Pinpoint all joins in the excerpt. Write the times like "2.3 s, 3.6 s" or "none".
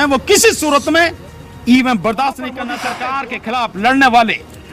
2.6 s